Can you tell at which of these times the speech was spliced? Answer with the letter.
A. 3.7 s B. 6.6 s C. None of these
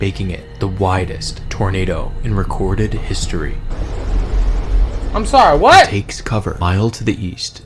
A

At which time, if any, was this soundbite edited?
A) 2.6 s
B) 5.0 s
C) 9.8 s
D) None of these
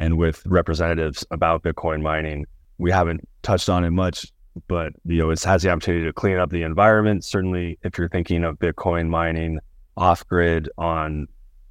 A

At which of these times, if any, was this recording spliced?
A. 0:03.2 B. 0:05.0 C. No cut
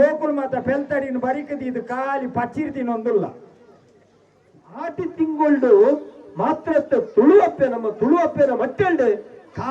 B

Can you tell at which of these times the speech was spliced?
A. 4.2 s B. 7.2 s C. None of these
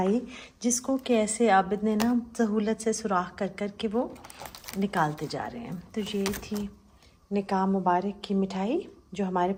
C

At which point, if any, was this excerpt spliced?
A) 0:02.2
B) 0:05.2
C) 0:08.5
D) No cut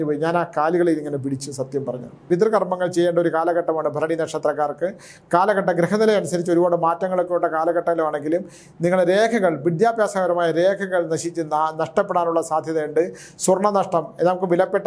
A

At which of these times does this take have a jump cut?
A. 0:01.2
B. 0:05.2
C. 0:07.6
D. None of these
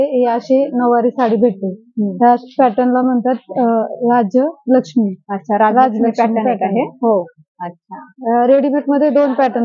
D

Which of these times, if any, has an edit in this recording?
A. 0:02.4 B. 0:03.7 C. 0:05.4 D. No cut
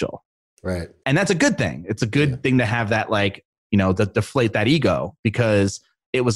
D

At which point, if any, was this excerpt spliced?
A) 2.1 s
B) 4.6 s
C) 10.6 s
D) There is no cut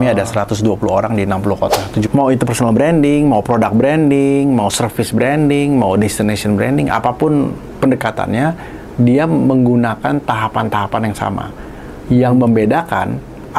A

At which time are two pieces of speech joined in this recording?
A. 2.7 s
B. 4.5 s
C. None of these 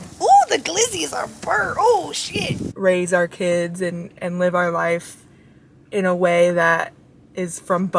A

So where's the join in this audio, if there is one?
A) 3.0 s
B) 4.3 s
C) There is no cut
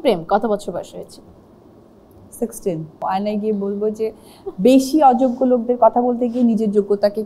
A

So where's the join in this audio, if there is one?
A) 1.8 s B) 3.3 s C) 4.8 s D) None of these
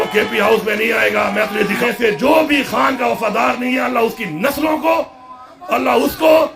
A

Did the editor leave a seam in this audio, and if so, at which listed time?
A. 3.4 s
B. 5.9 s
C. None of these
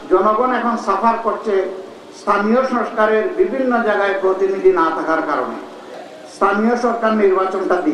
B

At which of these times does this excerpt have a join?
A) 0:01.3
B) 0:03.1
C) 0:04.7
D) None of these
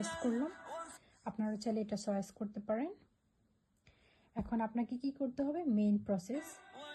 D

